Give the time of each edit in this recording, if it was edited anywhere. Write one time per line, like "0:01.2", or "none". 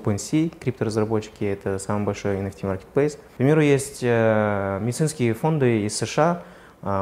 0:03.2